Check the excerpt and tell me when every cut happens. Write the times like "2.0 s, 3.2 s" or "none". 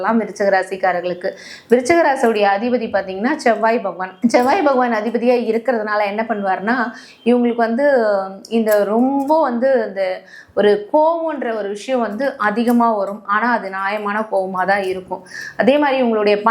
none